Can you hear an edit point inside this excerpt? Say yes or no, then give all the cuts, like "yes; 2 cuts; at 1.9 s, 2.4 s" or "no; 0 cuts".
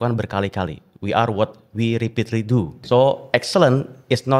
yes; 1 cut; at 2.8 s